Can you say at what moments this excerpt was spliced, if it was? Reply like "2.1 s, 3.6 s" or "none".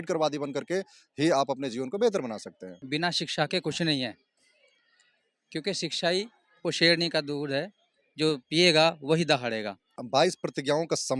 2.8 s, 9.9 s